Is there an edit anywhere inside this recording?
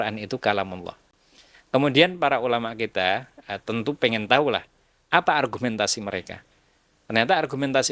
no; 0 cuts

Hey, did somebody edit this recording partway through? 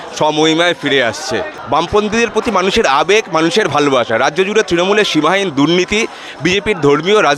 yes; 1 cut; at 1.5 s

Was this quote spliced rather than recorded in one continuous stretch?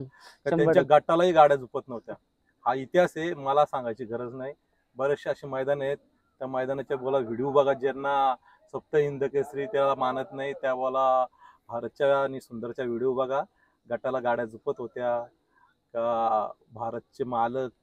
no; 0 cuts

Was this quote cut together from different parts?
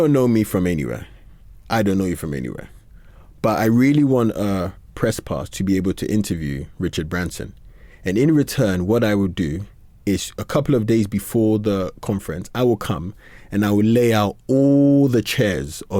no; 0 cuts

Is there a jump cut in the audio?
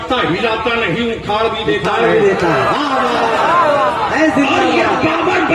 no; 0 cuts

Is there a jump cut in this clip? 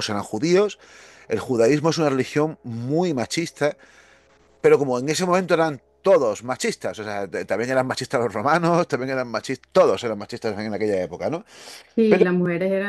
no; 0 cuts

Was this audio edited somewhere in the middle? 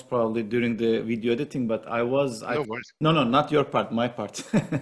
yes; 1 cut; at 2.8 s

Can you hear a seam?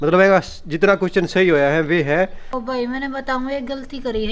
yes; 1 cut; at 2.5 s

